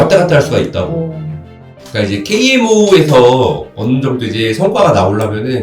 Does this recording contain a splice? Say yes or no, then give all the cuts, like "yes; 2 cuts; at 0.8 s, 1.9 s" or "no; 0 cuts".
yes; 1 cut; at 1.4 s